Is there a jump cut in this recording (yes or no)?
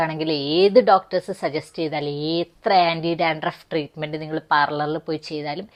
no